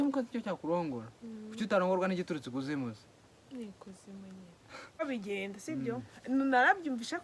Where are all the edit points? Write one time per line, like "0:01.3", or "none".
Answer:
0:05.0